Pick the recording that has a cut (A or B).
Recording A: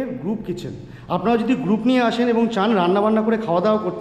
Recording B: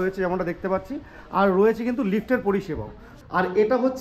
B